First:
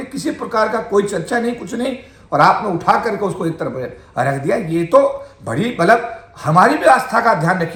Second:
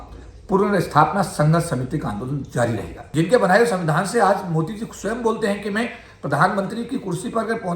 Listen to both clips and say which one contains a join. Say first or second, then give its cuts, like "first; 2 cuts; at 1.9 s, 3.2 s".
second; 1 cut; at 3.0 s